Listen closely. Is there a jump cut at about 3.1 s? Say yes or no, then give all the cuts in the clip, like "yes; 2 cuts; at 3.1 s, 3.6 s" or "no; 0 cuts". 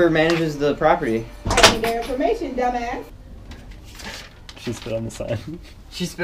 yes; 1 cut; at 3.1 s